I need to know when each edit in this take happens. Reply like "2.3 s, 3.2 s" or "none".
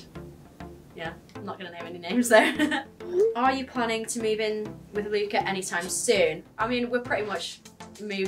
2.9 s, 6.4 s

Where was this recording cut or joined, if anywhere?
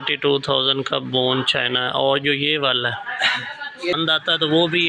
3.9 s

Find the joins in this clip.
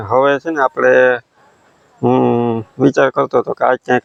none

